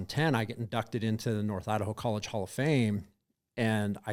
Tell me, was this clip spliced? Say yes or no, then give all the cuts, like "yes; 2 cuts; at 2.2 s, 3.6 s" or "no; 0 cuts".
no; 0 cuts